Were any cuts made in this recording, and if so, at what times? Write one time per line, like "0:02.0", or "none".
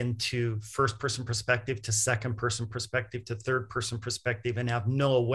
none